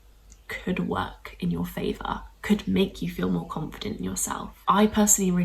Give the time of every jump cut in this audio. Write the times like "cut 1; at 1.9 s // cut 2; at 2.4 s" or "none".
cut 1; at 4.5 s